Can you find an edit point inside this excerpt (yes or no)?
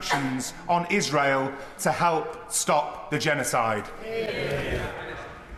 no